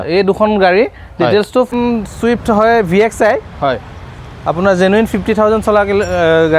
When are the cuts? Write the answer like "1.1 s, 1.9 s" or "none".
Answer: 1.7 s

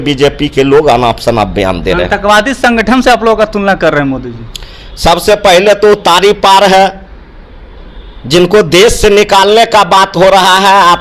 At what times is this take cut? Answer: none

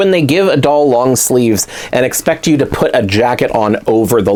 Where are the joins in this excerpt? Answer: none

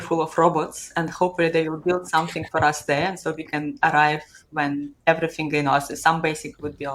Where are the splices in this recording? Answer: none

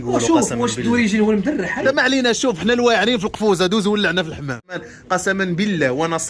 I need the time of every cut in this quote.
1.7 s, 4.7 s

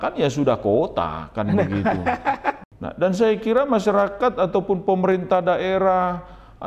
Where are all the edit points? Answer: 2.6 s

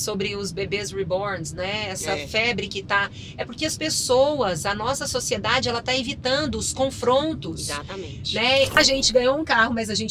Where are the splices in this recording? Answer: 8.8 s

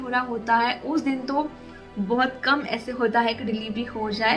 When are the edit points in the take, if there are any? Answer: none

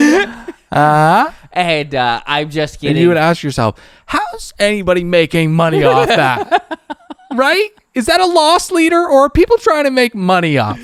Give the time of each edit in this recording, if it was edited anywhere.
none

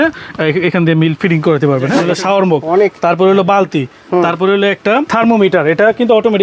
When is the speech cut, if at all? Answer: 2.1 s

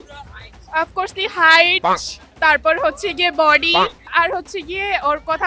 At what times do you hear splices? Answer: 4.0 s

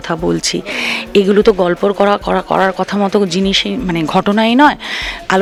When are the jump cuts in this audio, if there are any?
none

